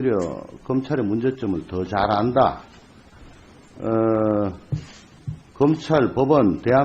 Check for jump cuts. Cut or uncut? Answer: cut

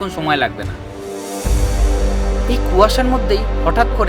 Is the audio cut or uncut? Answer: cut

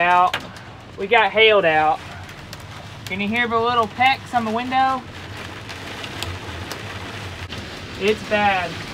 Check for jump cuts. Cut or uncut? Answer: uncut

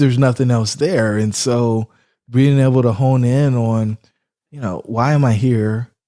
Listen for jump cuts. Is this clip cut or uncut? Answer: uncut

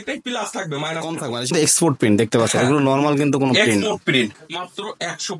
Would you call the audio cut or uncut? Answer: cut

